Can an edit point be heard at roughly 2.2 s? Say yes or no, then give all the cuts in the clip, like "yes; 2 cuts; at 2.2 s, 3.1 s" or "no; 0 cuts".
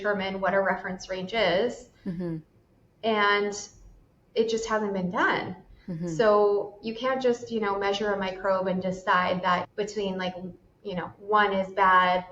no; 0 cuts